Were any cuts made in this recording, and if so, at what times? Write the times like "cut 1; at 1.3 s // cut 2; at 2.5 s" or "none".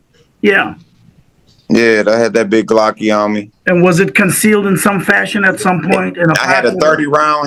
none